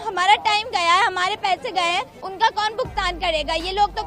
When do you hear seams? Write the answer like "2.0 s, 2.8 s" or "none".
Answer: 2.2 s